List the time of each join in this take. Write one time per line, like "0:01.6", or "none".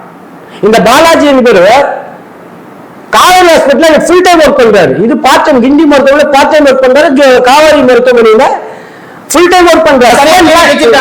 0:10.1